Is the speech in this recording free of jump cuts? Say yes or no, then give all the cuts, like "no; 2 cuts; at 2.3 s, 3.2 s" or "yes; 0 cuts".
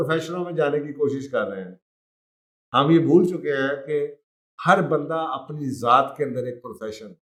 yes; 0 cuts